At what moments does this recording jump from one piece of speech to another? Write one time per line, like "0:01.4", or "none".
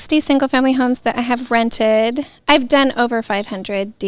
none